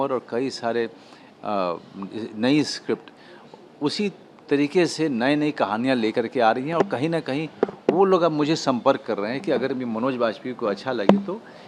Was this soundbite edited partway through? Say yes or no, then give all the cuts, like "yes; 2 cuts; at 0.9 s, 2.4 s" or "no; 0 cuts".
no; 0 cuts